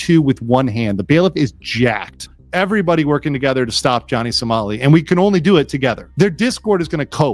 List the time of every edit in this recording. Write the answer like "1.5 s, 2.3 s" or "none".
2.2 s, 6.0 s

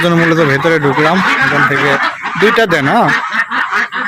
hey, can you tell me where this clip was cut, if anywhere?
2.0 s

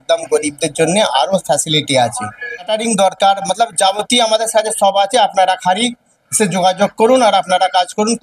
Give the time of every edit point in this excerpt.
2.7 s

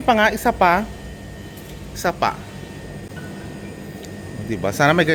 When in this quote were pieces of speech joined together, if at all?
none

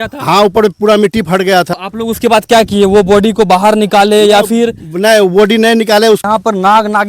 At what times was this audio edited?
1.7 s, 6.2 s

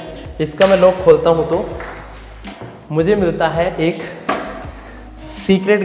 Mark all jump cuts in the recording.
none

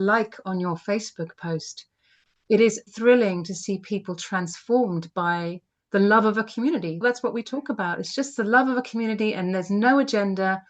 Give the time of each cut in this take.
2.8 s, 7.0 s

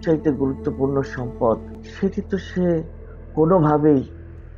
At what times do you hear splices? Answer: 1.8 s

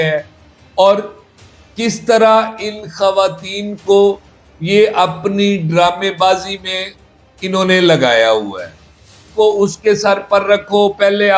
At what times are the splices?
9.2 s

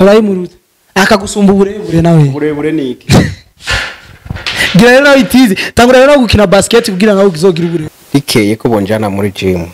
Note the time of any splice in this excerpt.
8.0 s

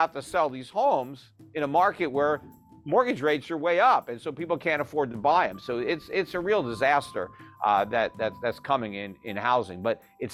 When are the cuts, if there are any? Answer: none

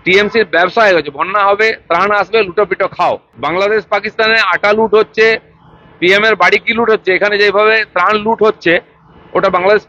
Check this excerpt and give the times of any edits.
3.3 s

